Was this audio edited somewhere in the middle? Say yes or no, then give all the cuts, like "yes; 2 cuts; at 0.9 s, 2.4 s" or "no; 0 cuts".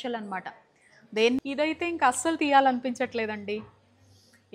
yes; 1 cut; at 1.4 s